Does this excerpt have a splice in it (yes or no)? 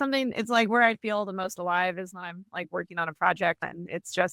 no